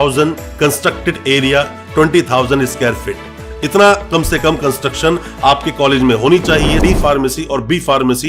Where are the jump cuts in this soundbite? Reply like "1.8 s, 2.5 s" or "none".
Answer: 6.8 s